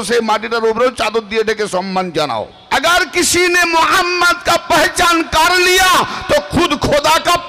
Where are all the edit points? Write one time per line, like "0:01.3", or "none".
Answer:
0:02.6